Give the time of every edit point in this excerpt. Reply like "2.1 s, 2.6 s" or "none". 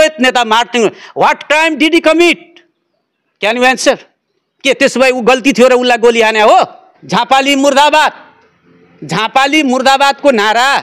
6.9 s